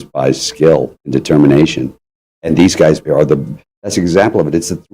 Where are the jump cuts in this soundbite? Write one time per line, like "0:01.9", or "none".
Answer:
0:01.0
0:03.0